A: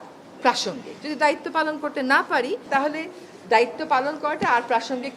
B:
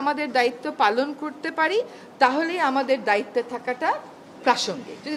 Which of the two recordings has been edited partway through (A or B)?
A